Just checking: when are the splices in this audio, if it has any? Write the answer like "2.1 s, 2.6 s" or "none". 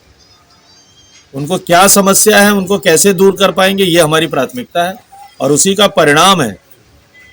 none